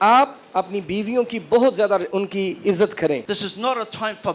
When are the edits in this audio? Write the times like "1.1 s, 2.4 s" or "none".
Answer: 2.1 s, 3.2 s

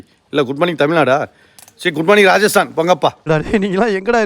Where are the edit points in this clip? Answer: 3.3 s

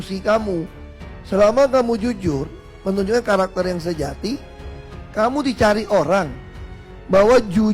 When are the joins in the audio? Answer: 6.6 s

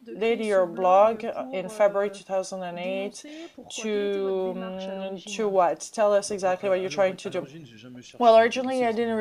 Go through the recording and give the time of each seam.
5.9 s

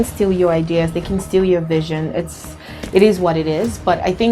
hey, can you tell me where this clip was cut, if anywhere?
none

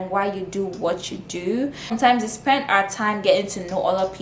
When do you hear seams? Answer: 1.8 s

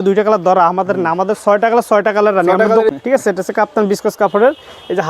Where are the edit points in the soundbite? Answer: 2.9 s

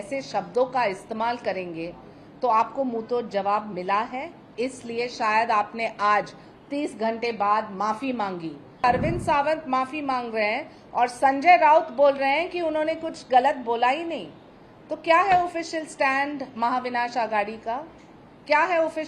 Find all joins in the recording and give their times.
8.8 s

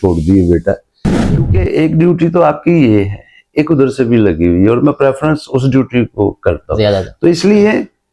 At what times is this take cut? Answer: 1.4 s

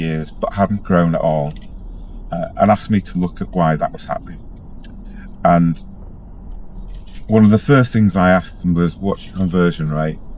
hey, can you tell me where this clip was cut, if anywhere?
none

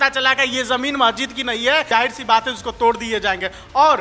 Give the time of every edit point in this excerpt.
1.9 s

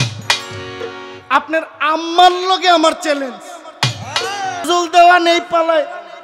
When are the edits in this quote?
4.7 s

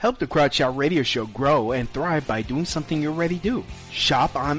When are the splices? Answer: 1.2 s

